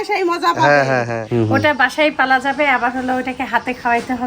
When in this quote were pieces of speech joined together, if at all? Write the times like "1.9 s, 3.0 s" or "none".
1.2 s